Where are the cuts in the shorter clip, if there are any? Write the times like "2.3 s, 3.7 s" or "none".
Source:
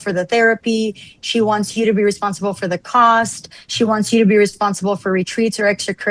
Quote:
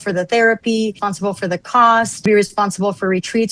1.1 s, 2.3 s